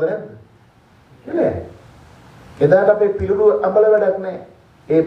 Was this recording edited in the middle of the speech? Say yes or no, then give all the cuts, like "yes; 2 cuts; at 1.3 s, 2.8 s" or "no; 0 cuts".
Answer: yes; 1 cut; at 1.3 s